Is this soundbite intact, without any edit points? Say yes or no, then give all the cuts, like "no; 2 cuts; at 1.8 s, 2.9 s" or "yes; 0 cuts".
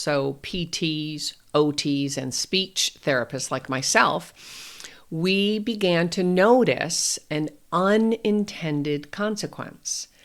yes; 0 cuts